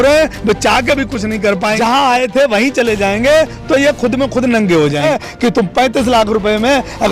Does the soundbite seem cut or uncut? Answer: cut